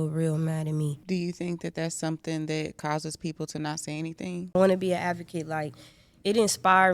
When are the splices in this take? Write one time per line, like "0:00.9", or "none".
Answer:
0:01.0
0:04.6